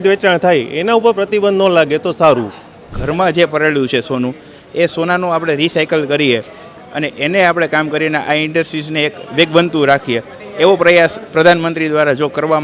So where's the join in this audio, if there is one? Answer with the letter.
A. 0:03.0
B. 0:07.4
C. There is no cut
A